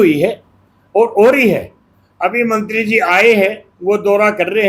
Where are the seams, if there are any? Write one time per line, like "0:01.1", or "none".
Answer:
none

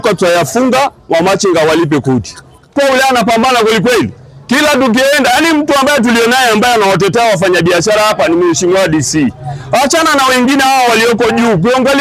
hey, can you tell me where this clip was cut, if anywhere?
0:02.7

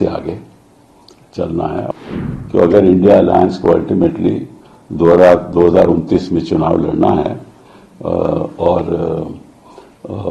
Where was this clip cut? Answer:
0:01.9

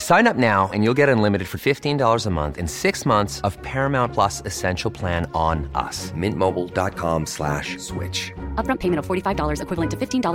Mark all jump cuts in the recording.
none

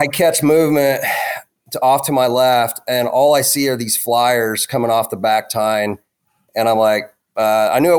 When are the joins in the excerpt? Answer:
none

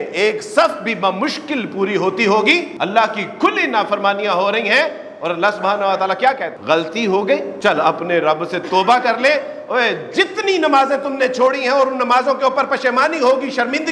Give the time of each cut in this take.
0:02.7
0:06.5
0:07.5

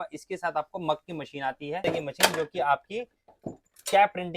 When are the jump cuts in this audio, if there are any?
0:01.8

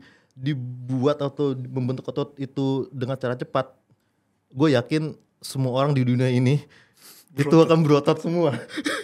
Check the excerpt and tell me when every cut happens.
none

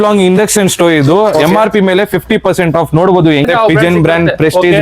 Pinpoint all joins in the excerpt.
0:03.5

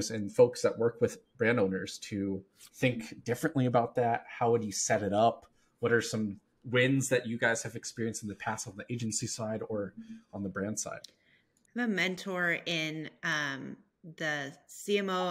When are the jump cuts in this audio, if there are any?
none

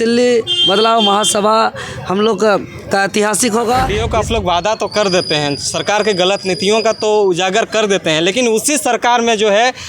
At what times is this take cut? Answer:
0:04.0

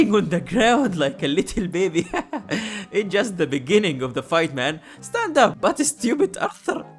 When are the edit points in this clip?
0:05.6

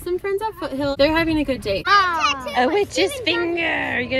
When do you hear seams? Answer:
0:01.9

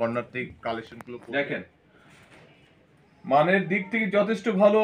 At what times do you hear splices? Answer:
0:01.0

